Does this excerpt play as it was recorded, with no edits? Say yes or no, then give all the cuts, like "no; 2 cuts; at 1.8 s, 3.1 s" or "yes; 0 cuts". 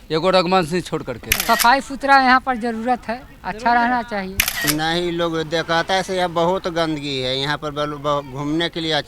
no; 2 cuts; at 1.3 s, 4.6 s